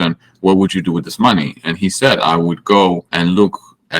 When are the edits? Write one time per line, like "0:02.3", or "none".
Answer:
0:03.1